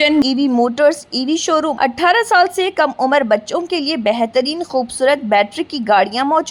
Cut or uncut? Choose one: cut